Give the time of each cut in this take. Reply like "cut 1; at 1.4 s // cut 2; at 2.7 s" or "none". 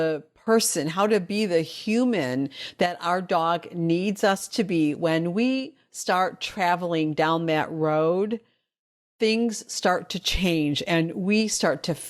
none